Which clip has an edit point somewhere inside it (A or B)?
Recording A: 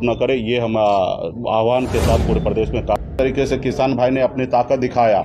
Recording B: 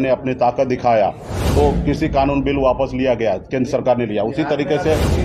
A